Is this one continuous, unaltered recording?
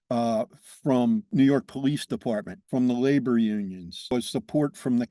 no; 3 cuts; at 1.3 s, 2.5 s, 4.1 s

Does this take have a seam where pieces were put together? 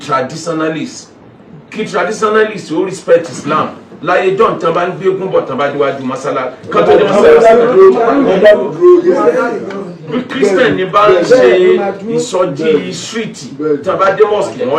no; 0 cuts

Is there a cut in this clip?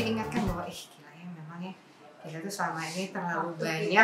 no; 0 cuts

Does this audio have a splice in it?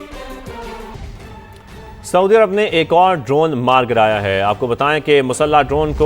yes; 1 cut; at 0.9 s

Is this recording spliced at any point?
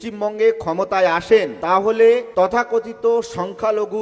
yes; 2 cuts; at 1.5 s, 2.3 s

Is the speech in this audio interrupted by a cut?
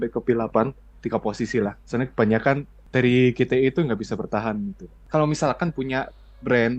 yes; 3 cuts; at 0.9 s, 2.7 s, 4.9 s

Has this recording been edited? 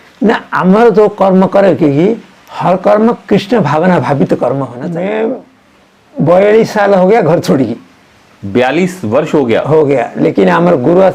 yes; 1 cut; at 4.8 s

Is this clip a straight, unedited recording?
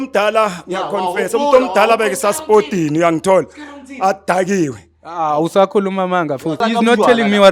yes; 0 cuts

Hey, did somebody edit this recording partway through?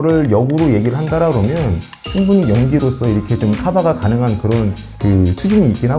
no; 0 cuts

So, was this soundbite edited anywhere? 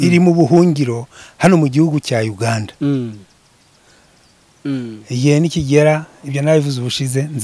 yes; 1 cut; at 4.5 s

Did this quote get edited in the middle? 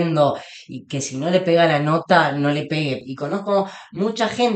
yes; 1 cut; at 3.0 s

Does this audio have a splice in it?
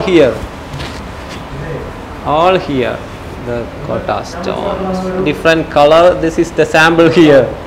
no; 0 cuts

